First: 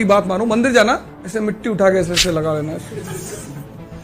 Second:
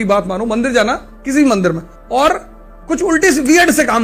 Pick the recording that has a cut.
first; 1 cut; at 1.1 s

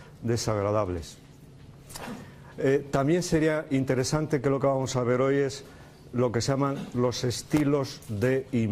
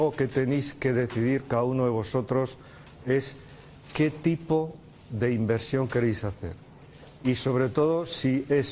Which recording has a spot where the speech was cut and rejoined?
first; 1 cut; at 4.8 s

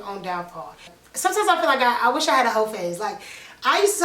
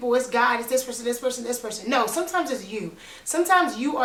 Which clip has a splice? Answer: first; 1 cut; at 1.0 s

